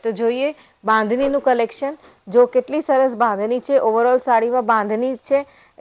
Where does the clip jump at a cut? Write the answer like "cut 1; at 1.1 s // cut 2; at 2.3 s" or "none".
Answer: none